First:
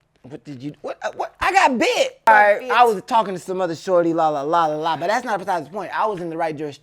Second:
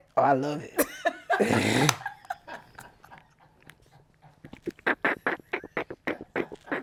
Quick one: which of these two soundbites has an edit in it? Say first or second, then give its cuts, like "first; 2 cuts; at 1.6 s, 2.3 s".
first; 1 cut; at 2.3 s